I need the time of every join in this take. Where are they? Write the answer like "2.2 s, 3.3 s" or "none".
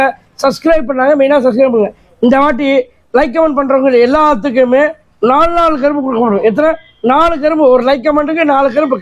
none